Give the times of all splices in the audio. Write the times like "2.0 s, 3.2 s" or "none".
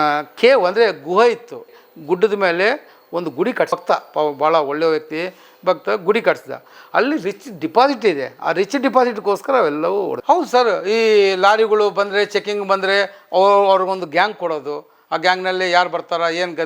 10.2 s